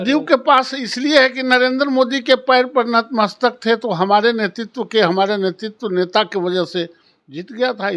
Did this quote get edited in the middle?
no; 0 cuts

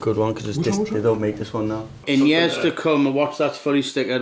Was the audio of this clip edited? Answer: yes; 1 cut; at 1.9 s

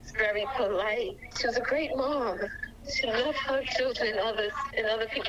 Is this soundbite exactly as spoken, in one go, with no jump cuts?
no; 1 cut; at 2.6 s

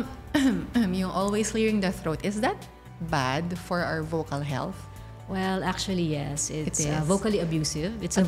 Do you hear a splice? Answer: no; 0 cuts

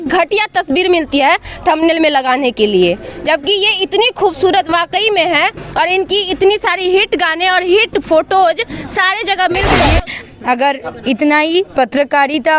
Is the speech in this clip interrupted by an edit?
yes; 1 cut; at 9.8 s

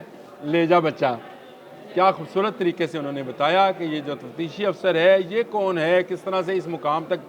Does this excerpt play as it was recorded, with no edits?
yes; 0 cuts

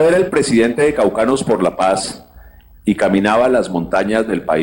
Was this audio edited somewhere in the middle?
no; 0 cuts

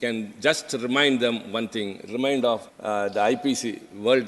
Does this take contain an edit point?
yes; 1 cut; at 2.7 s

